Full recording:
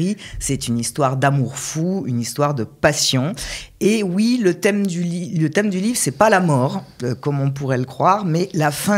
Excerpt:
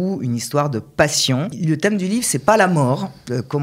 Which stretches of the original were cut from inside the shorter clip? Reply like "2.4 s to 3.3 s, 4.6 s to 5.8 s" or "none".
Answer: 3.4 s to 5.3 s